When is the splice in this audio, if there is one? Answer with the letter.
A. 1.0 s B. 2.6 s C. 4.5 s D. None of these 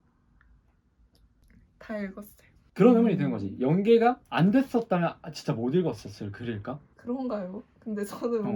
B